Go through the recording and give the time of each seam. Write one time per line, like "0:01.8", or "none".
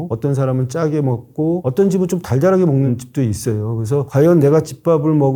none